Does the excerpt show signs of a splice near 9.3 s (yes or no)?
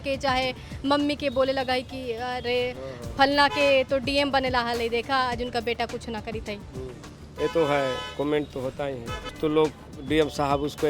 yes